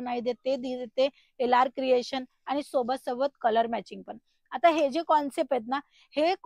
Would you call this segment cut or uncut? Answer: uncut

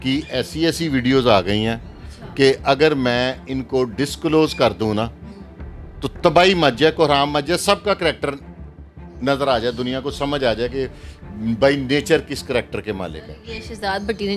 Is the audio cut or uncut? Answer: uncut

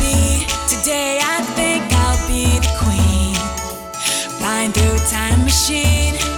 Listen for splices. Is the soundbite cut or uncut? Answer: uncut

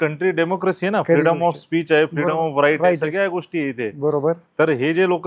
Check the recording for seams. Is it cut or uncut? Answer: uncut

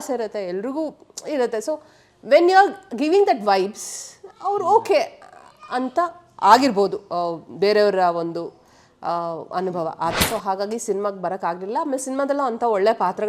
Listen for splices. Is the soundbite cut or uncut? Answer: cut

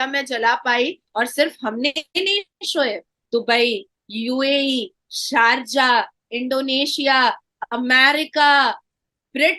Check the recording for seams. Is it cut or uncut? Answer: cut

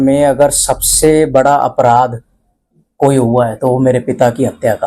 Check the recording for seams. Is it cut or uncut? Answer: uncut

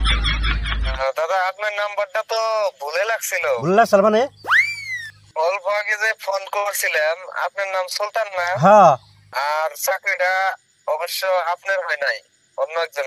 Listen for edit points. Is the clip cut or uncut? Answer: cut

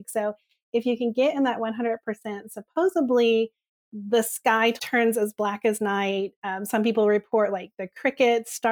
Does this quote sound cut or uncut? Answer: cut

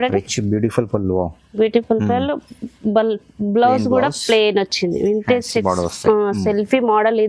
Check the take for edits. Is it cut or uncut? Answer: uncut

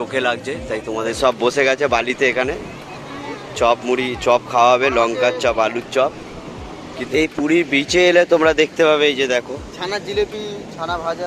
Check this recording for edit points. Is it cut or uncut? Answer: cut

